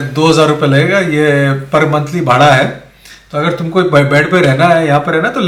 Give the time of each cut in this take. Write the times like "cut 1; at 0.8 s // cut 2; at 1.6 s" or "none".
none